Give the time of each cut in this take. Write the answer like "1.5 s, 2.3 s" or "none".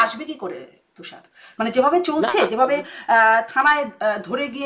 none

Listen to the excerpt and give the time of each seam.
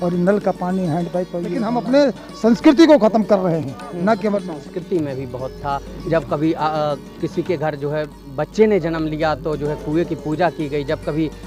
1.6 s, 4.6 s

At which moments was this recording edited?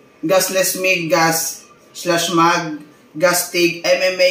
none

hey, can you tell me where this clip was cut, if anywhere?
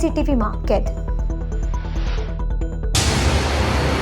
2.8 s

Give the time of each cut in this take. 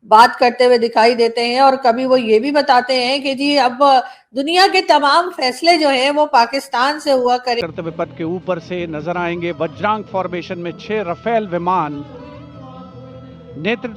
7.7 s

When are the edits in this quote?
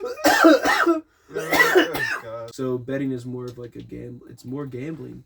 2.5 s

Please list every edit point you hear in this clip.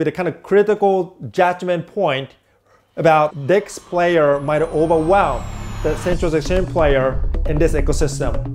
none

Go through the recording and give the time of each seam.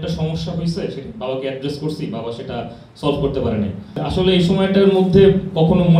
3.9 s

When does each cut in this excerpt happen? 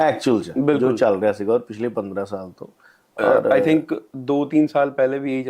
none

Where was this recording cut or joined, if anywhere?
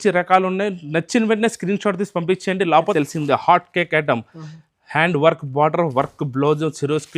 2.9 s

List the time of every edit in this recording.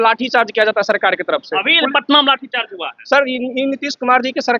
none

